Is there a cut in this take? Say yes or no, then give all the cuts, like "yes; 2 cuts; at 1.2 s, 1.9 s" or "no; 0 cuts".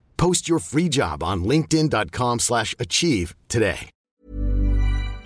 yes; 1 cut; at 3.9 s